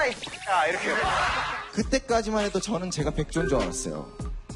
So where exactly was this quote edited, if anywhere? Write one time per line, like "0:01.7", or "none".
0:01.5